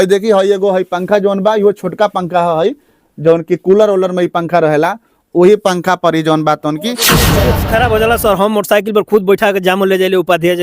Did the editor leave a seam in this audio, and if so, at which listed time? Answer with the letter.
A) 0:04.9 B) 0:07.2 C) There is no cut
B